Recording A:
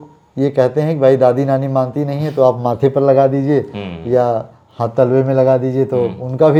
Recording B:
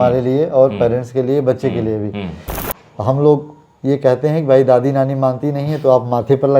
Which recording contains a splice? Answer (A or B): B